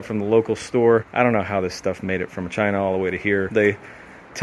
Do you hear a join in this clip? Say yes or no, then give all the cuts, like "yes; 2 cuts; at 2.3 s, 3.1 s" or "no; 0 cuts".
yes; 2 cuts; at 1.1 s, 3.5 s